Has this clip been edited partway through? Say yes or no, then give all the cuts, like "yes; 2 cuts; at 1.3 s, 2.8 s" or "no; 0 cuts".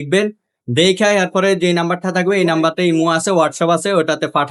no; 0 cuts